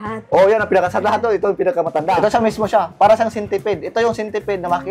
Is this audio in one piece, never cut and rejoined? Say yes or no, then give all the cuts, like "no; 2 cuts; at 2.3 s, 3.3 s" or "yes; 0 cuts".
no; 1 cut; at 2.1 s